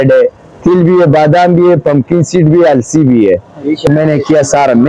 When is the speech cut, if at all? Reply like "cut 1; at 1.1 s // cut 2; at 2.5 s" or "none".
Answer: cut 1; at 3.9 s